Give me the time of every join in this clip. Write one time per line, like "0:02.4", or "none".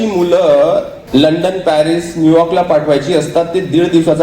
0:01.0